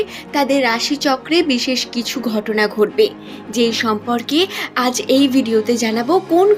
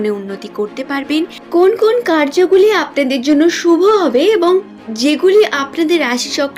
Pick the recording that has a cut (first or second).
second